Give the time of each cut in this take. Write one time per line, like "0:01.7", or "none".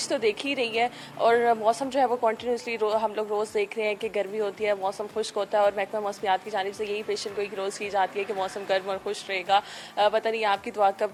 none